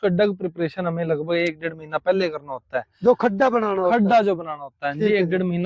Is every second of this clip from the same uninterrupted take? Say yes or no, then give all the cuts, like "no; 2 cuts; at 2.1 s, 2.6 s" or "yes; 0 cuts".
yes; 0 cuts